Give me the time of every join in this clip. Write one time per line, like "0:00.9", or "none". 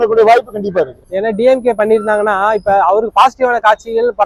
none